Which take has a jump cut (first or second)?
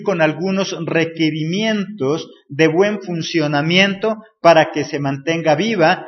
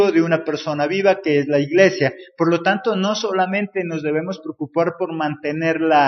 second